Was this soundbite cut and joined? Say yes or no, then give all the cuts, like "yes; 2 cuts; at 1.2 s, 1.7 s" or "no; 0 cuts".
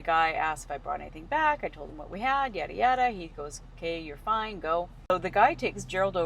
yes; 1 cut; at 5.1 s